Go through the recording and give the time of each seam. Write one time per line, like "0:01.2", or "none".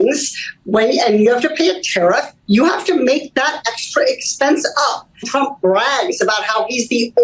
0:05.3